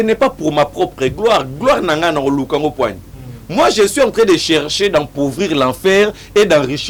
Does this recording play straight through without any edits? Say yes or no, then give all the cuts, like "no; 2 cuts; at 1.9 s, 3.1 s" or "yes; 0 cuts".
yes; 0 cuts